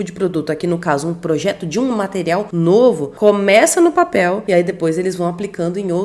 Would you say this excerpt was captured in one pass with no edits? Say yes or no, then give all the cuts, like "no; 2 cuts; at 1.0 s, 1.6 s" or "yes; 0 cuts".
no; 2 cuts; at 2.7 s, 4.4 s